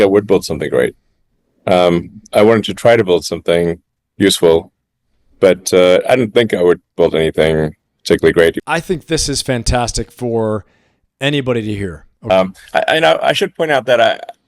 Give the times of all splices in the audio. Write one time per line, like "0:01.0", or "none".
0:08.6
0:12.1